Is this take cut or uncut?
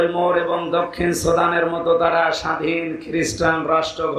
uncut